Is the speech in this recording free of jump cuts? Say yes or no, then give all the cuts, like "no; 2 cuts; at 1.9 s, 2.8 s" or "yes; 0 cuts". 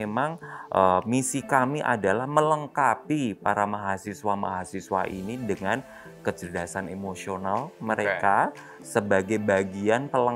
yes; 0 cuts